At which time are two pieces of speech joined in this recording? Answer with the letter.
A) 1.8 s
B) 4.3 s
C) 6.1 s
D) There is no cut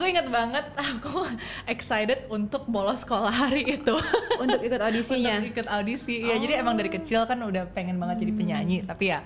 D